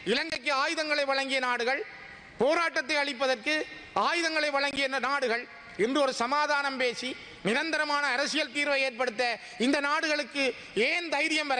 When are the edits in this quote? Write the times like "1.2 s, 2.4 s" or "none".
none